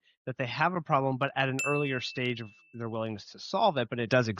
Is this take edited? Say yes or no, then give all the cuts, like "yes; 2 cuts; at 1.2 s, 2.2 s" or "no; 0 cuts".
no; 0 cuts